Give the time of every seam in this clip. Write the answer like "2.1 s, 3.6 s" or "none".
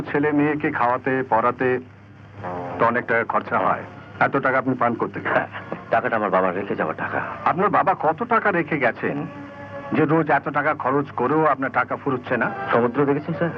4.0 s, 5.7 s, 7.3 s, 12.6 s

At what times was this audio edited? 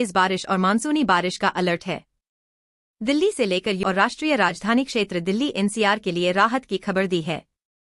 3.8 s

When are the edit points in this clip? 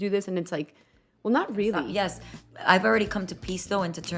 1.9 s

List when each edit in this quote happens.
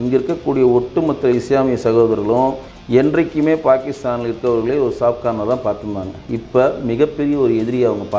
none

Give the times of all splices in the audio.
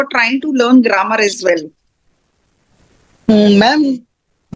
none

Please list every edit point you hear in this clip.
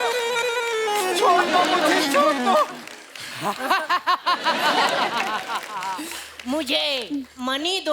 none

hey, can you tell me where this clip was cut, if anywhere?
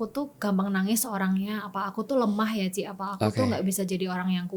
none

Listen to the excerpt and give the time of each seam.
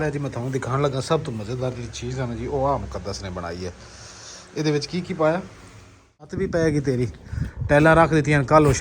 6.3 s

